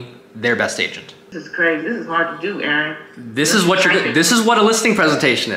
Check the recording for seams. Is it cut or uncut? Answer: cut